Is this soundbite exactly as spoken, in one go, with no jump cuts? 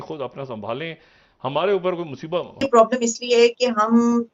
no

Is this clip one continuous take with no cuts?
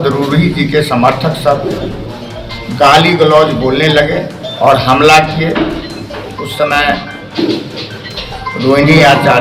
yes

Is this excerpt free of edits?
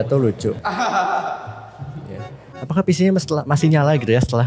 no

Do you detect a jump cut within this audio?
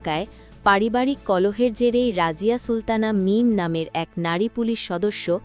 no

